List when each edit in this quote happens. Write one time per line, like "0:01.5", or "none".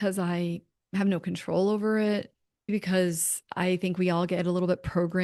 0:02.7